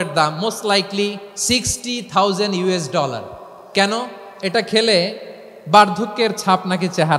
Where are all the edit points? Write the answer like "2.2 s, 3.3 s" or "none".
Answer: 1.3 s, 3.5 s